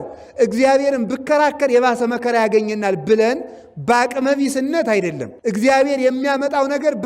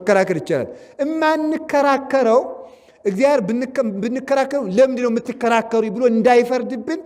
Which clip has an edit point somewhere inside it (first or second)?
first